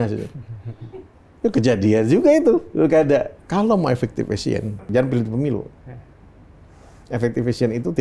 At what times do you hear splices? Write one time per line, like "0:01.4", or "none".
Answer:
0:03.4
0:04.9